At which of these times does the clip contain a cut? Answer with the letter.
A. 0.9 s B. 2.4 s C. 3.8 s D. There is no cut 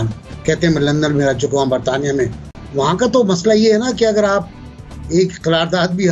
B